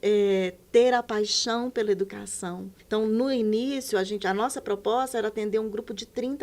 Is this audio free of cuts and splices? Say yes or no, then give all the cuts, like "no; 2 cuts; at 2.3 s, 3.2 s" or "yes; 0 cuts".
no; 1 cut; at 2.7 s